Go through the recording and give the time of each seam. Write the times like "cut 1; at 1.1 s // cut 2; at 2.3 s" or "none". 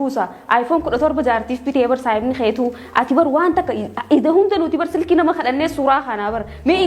none